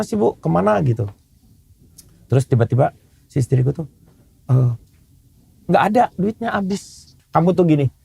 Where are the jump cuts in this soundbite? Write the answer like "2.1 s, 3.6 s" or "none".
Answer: 7.1 s